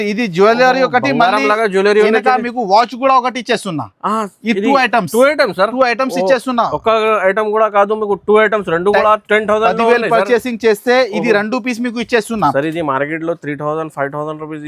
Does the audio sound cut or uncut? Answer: uncut